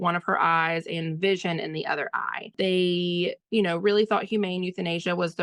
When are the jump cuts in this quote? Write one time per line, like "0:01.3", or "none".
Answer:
0:02.5

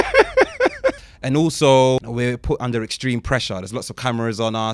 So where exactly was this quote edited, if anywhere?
0:01.1
0:02.0

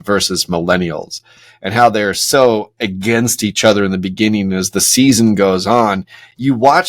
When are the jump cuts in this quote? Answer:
none

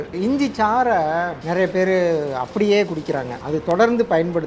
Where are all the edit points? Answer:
0:01.4
0:03.3

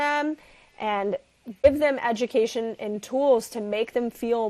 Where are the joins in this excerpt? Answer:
0:01.6

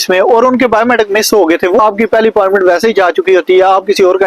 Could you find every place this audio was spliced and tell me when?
0:01.8

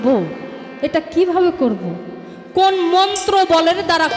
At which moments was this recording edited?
none

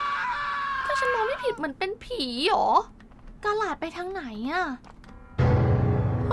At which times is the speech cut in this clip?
0:02.8

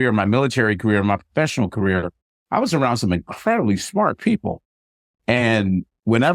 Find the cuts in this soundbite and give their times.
none

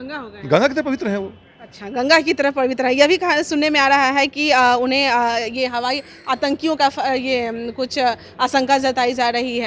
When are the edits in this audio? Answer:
none

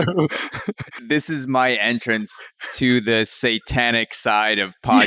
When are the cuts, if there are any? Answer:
0:00.9

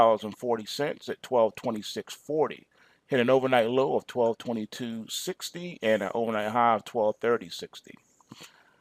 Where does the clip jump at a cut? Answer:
0:01.2

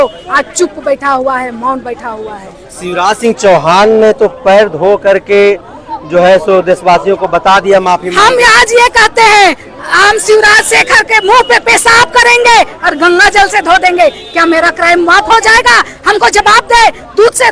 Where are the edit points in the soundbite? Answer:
none

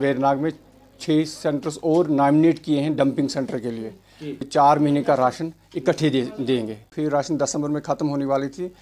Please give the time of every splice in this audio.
0:04.5
0:06.9

